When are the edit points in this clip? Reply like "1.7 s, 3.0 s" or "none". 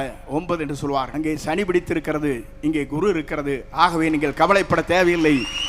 1.1 s